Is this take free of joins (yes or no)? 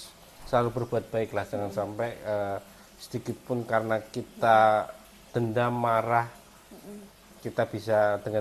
yes